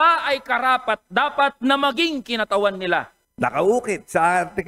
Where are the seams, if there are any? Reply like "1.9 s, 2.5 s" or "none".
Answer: 3.2 s